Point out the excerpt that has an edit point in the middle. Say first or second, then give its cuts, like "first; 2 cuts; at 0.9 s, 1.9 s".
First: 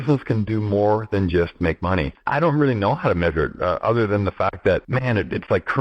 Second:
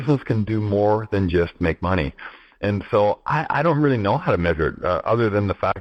first; 2 cuts; at 2.2 s, 4.9 s